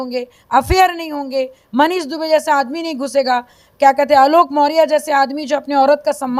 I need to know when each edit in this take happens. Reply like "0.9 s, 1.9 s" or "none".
none